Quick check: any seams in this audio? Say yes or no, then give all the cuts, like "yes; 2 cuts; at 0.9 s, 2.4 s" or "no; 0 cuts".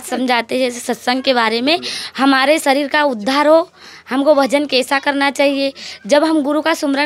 no; 0 cuts